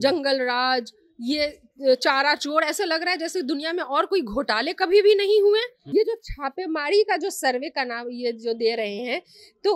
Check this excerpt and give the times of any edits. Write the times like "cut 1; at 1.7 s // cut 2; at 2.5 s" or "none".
cut 1; at 5.8 s

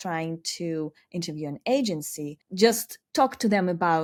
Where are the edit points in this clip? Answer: none

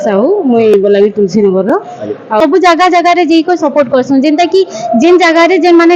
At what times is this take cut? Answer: cut 1; at 2.4 s

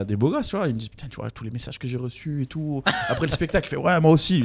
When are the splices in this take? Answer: none

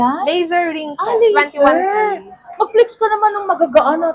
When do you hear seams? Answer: none

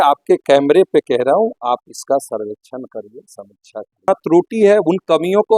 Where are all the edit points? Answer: cut 1; at 4.1 s

